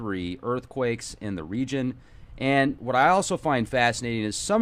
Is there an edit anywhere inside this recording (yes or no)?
yes